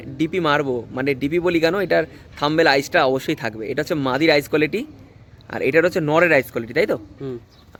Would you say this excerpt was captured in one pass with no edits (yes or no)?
yes